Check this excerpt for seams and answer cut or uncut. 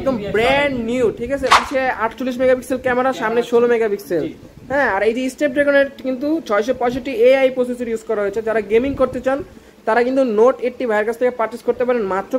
cut